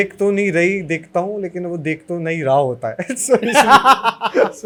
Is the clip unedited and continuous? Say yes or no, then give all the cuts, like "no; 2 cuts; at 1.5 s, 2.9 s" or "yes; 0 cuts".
yes; 0 cuts